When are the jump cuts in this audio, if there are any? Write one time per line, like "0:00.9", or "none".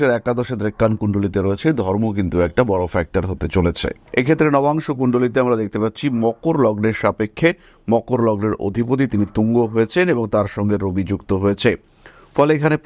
0:04.1